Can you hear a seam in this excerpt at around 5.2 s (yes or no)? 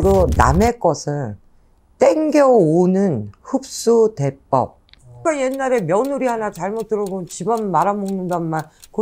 yes